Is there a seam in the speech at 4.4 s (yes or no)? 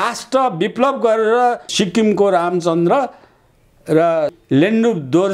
yes